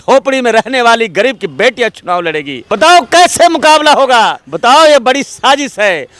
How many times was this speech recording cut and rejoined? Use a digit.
2